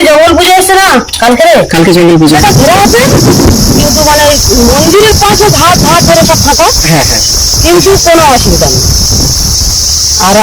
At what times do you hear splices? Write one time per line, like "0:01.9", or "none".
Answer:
0:02.2